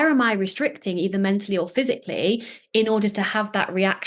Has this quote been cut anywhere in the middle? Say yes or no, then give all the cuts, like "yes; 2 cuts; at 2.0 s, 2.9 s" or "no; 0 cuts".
no; 0 cuts